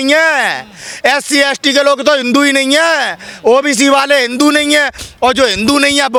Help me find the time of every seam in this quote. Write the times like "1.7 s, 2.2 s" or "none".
none